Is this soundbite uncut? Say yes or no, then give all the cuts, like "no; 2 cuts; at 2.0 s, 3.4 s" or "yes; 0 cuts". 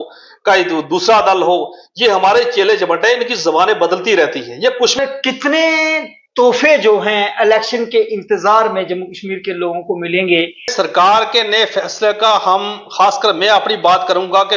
no; 2 cuts; at 5.0 s, 10.7 s